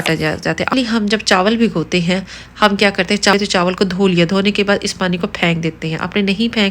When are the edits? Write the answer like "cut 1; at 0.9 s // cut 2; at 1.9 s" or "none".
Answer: cut 1; at 0.7 s // cut 2; at 3.3 s

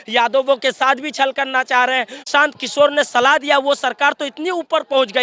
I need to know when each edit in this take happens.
cut 1; at 2.3 s

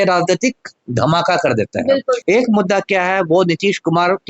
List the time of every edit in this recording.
cut 1; at 2.2 s

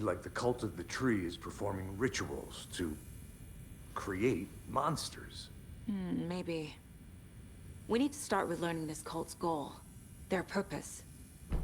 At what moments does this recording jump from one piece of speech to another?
none

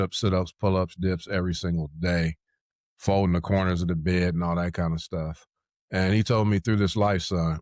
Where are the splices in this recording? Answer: none

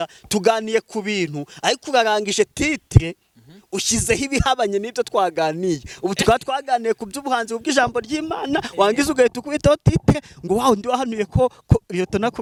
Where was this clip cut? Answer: none

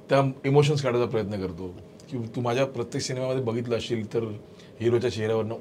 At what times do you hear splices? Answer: none

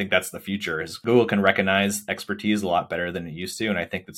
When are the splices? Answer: cut 1; at 1.0 s

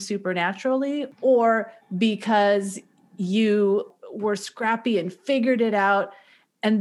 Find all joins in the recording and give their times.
cut 1; at 1.1 s // cut 2; at 4.0 s

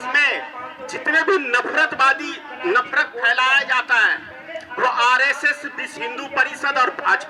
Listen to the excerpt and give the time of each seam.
none

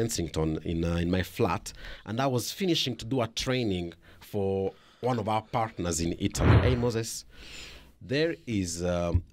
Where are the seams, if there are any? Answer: cut 1; at 6.6 s

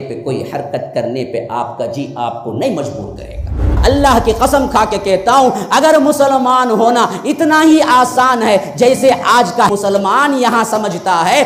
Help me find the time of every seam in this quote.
cut 1; at 3.8 s // cut 2; at 9.7 s

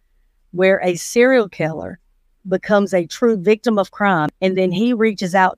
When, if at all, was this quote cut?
cut 1; at 4.3 s

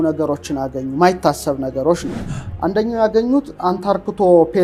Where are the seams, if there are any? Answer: none

